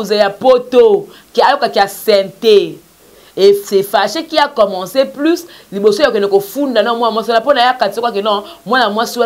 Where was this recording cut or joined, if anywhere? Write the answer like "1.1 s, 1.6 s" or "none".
none